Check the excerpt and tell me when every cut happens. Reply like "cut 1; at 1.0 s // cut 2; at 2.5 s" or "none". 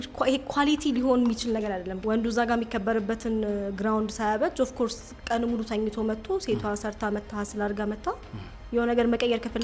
cut 1; at 1.9 s